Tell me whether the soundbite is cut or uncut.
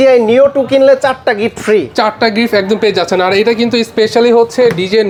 uncut